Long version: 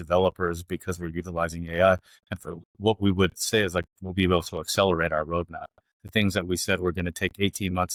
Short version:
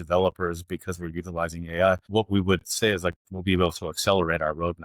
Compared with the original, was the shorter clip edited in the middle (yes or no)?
yes